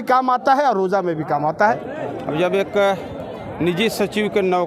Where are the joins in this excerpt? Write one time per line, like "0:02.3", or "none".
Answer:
0:01.9